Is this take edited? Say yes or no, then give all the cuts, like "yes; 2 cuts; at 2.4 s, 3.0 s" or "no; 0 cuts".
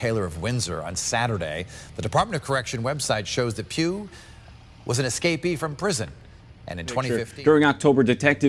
yes; 1 cut; at 7.2 s